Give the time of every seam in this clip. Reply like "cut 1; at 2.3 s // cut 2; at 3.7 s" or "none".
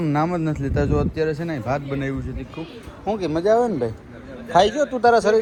none